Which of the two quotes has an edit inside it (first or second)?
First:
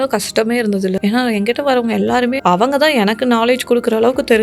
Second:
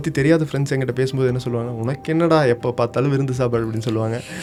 first